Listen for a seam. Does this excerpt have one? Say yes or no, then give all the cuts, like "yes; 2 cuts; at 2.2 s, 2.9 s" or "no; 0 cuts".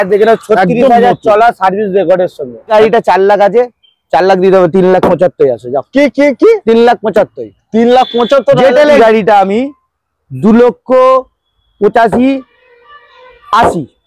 yes; 2 cuts; at 2.7 s, 9.0 s